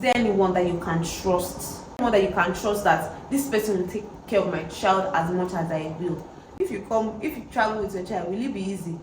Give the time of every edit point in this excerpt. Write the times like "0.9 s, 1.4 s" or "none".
2.0 s, 6.5 s